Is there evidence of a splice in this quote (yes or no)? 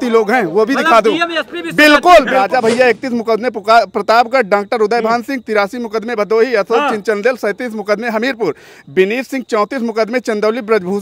yes